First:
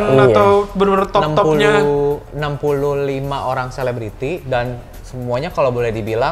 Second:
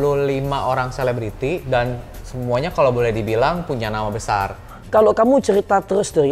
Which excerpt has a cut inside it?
second; 1 cut; at 4.6 s

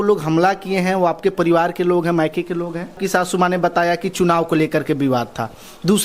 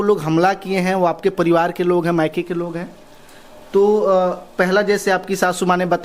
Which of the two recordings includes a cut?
first; 1 cut; at 3.0 s

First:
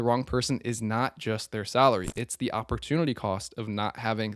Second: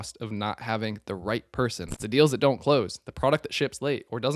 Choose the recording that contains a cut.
second; 1 cut; at 1.9 s

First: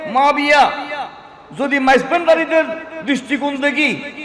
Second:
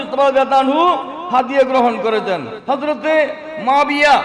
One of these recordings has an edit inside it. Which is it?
second; 1 cut; at 2.5 s

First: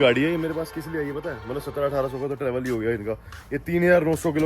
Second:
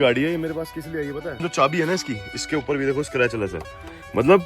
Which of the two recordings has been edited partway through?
second; 1 cut; at 1.4 s

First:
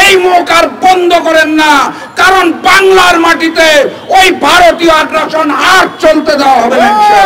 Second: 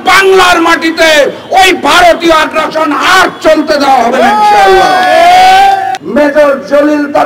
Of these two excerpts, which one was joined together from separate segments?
second; 1 cut; at 6.0 s

